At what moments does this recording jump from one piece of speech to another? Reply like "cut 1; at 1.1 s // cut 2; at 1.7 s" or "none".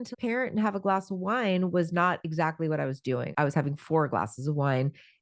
cut 1; at 3.3 s